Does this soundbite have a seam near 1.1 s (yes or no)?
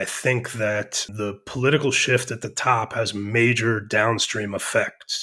yes